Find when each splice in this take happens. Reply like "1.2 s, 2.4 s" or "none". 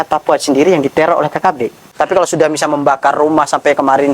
1.8 s